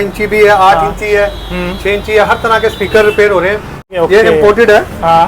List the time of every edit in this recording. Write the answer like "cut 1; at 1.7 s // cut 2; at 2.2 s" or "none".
cut 1; at 3.9 s